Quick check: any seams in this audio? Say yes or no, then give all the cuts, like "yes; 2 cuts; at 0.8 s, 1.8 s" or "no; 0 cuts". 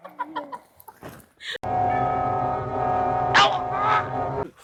no; 0 cuts